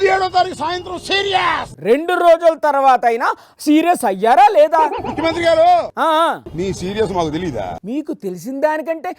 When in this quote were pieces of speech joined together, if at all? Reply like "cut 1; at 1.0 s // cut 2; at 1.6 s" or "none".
none